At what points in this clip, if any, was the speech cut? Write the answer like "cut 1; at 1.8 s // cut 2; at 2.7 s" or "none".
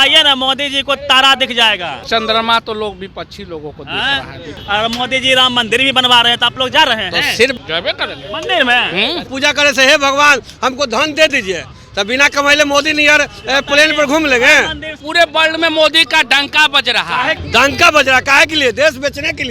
cut 1; at 2.0 s // cut 2; at 4.6 s // cut 3; at 7.6 s // cut 4; at 9.3 s // cut 5; at 15.0 s // cut 6; at 17.4 s